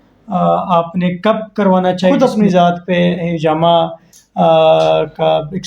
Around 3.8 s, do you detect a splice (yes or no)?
no